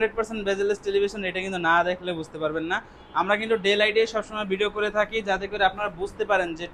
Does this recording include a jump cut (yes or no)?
no